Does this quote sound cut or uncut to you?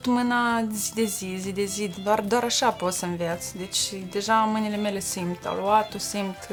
uncut